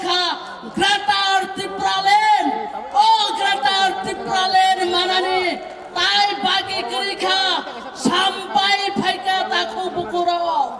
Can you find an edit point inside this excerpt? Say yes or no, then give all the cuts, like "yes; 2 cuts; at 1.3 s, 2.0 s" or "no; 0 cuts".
no; 0 cuts